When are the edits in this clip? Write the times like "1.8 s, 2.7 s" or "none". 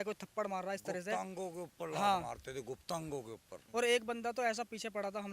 3.5 s